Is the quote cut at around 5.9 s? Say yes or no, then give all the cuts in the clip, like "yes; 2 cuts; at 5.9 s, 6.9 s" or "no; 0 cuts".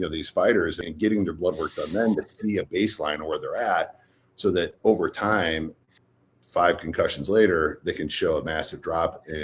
yes; 2 cuts; at 0.8 s, 5.9 s